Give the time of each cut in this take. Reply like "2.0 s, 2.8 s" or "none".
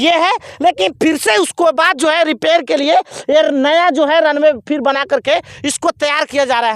none